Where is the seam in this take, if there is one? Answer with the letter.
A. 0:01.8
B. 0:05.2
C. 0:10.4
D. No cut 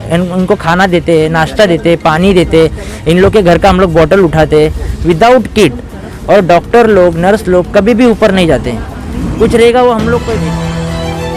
C